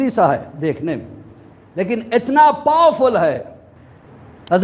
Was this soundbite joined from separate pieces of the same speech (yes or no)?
no